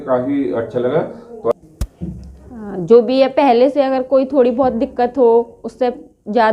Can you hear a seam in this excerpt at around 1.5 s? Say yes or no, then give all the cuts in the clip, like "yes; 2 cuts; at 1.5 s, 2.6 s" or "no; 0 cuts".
yes; 1 cut; at 1.5 s